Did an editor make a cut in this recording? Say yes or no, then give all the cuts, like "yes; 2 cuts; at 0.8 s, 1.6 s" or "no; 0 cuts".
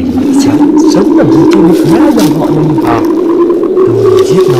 no; 0 cuts